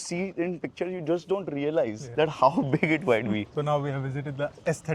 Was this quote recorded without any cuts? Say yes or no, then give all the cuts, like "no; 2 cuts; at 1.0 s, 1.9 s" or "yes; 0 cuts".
yes; 0 cuts